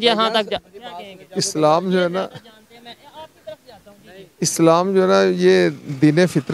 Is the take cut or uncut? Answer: uncut